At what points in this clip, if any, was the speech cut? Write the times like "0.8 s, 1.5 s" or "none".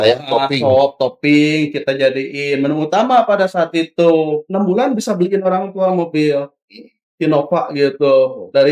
4.5 s